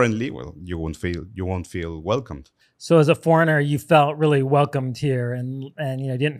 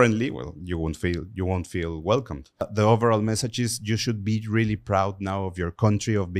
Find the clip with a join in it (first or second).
second